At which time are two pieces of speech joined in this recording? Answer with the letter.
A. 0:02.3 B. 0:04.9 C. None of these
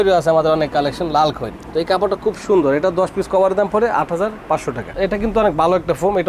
B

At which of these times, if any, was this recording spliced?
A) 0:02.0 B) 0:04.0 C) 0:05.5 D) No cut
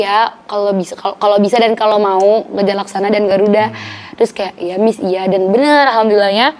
D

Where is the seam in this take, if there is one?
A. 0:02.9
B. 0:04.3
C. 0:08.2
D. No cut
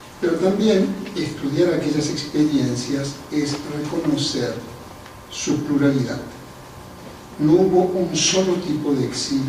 D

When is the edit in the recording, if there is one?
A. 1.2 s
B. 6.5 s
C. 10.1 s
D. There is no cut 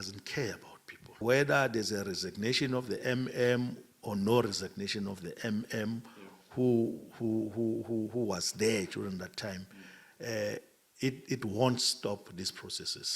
A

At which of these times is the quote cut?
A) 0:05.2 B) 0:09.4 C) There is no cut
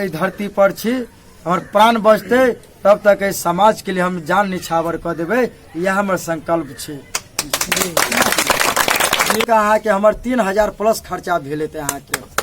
B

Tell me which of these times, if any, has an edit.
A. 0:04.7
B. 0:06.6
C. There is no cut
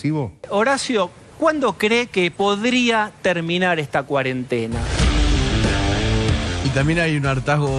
B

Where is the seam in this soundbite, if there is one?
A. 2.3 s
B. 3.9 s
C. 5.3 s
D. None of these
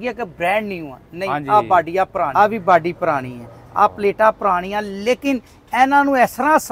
A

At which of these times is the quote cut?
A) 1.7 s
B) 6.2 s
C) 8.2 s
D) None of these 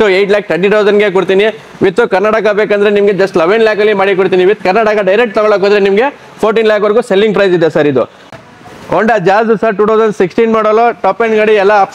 C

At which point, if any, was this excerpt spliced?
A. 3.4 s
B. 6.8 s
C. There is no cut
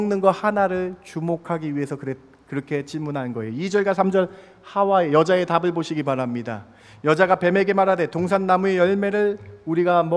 C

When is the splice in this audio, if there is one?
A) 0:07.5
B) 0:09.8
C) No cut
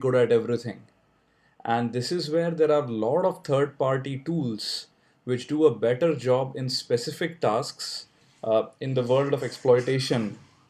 B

